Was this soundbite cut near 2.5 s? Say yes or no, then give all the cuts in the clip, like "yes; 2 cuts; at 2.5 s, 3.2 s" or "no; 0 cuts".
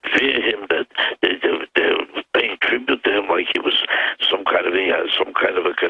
yes; 1 cut; at 2.5 s